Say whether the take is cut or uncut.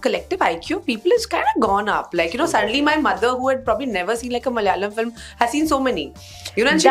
uncut